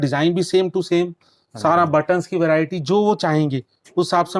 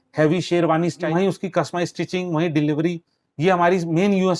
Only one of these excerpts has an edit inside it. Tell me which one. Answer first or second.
second